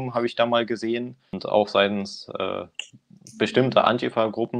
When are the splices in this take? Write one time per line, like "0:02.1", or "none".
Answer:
0:01.4

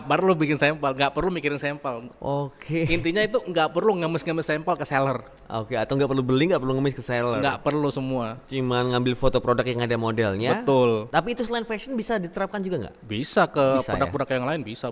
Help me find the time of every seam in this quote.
none

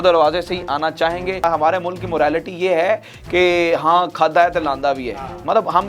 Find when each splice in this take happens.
0:01.4

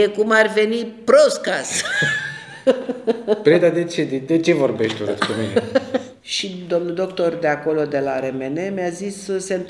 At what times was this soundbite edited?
0:06.2

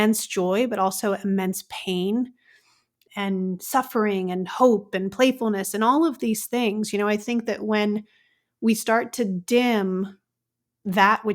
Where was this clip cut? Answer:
0:03.0

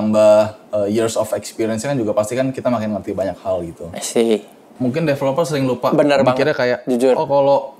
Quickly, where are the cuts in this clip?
0:04.6

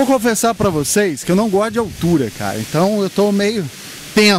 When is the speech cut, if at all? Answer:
none

